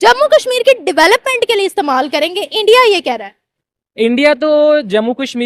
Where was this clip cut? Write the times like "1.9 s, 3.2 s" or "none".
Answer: none